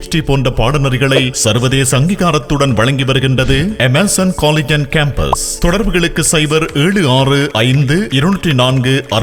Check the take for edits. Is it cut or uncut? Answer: uncut